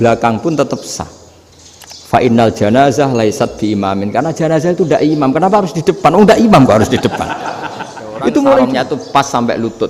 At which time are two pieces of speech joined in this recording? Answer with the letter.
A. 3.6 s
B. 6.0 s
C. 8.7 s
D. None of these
C